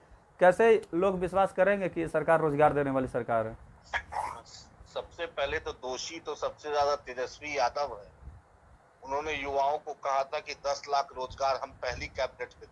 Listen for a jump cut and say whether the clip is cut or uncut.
uncut